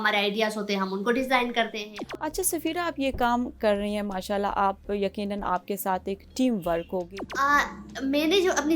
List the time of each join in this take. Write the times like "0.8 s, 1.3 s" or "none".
2.0 s, 7.1 s